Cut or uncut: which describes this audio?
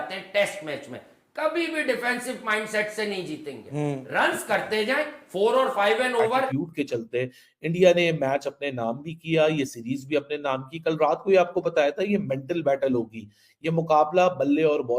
cut